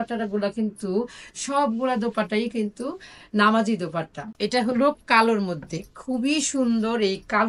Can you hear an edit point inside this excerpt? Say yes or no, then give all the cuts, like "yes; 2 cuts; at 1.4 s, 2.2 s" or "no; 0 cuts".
yes; 1 cut; at 4.3 s